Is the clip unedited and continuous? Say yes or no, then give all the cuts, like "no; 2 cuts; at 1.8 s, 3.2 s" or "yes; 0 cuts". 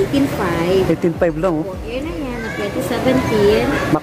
yes; 0 cuts